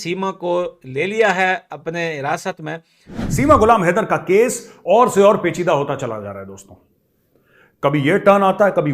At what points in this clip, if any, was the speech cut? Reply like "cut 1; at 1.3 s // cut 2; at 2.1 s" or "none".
cut 1; at 3.4 s